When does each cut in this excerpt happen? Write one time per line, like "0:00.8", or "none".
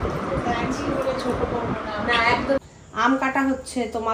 0:02.6

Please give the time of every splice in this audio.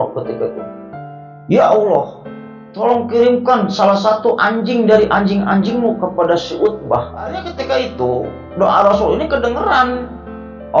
0:07.5

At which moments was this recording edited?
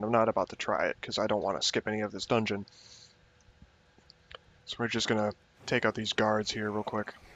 none

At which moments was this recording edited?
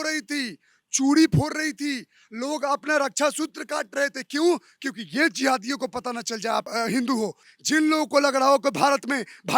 0:06.7
0:07.5

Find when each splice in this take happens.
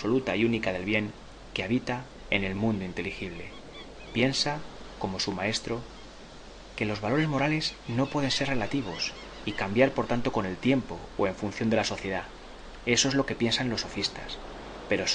none

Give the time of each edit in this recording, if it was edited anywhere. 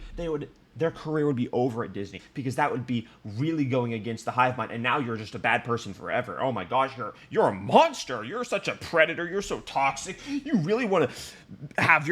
0:02.2

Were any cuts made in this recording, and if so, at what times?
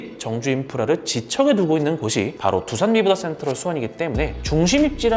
none

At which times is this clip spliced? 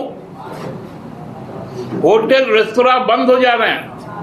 none

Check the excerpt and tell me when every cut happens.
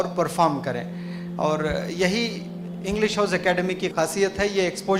none

